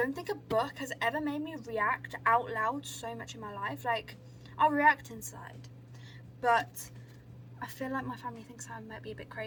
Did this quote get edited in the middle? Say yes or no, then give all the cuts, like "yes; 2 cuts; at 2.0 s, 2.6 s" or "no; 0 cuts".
no; 0 cuts